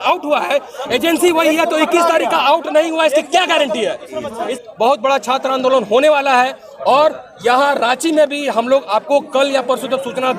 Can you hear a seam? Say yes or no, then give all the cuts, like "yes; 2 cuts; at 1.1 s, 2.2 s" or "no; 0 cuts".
yes; 1 cut; at 4.5 s